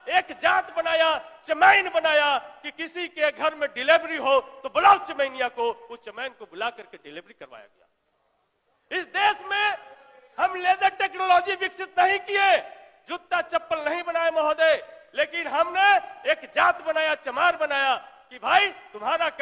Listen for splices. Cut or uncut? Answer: uncut